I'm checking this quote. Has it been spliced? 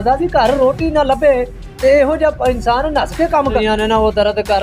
yes; 1 cut; at 3.6 s

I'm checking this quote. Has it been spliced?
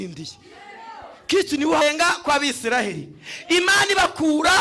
yes; 1 cut; at 1.8 s

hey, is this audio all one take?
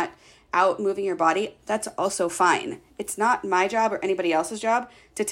yes; 0 cuts

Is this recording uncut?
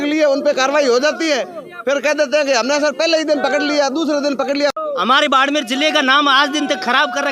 no; 1 cut; at 4.8 s

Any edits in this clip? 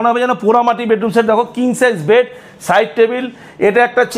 no; 0 cuts

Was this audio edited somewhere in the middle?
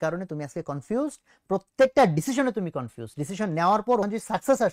no; 0 cuts

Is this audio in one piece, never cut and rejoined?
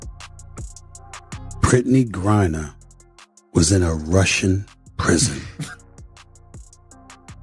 no; 2 cuts; at 1.6 s, 6.1 s

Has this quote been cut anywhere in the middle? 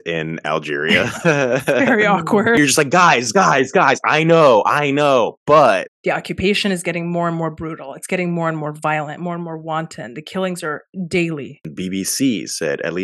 yes; 3 cuts; at 2.6 s, 5.9 s, 11.6 s

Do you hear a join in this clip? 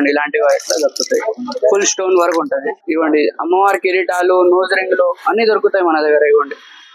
yes; 1 cut; at 2.7 s

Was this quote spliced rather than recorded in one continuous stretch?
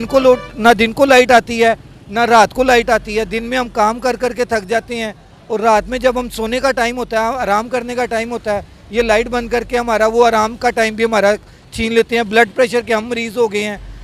no; 0 cuts

